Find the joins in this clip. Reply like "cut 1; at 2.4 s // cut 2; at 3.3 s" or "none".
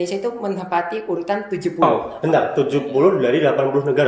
cut 1; at 1.8 s